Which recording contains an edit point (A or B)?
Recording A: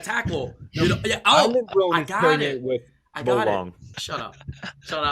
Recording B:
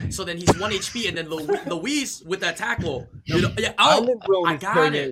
A